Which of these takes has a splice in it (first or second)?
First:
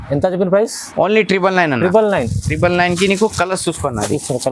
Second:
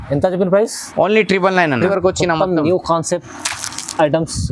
second